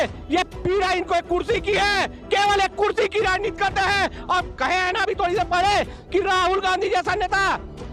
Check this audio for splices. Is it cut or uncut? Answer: uncut